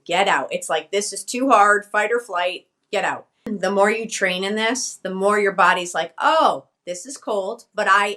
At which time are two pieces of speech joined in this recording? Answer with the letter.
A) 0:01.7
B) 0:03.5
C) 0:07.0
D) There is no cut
B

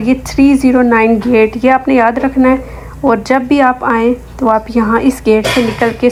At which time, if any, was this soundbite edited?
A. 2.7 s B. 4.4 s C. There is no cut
C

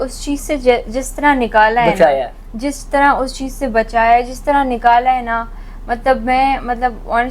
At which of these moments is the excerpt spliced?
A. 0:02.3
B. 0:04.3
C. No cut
C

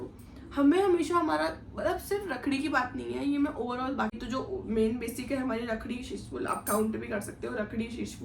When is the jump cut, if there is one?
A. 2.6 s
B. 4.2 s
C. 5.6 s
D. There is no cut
B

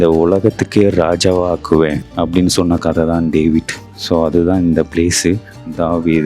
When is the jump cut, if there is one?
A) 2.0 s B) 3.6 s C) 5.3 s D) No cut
A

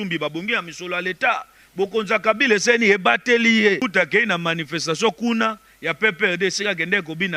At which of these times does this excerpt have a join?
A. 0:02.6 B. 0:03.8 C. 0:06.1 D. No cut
B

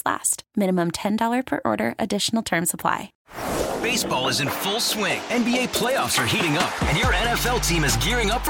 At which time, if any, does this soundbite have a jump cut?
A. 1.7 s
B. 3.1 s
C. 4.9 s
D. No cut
B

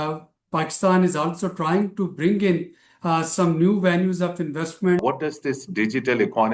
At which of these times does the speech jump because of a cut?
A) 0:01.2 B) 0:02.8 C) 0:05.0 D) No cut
C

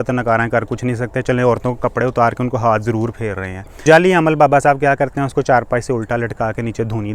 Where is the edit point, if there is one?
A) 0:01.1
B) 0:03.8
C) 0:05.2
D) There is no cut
B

